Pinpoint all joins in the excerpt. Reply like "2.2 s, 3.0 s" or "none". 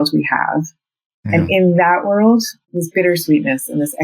2.6 s